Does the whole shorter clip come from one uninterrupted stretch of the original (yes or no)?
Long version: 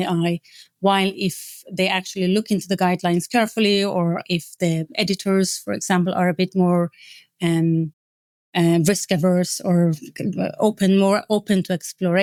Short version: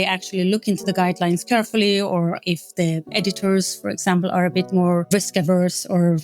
no